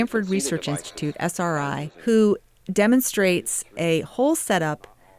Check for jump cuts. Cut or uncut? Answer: uncut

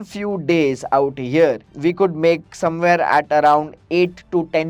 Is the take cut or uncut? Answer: uncut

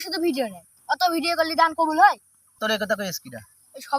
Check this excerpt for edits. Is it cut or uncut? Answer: cut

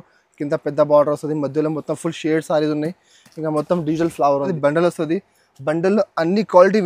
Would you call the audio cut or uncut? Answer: cut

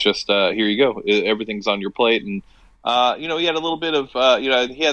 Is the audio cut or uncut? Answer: uncut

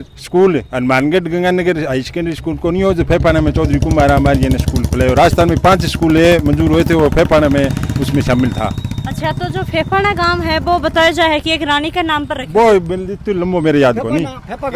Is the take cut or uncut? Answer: uncut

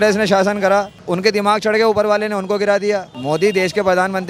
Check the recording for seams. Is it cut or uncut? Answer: cut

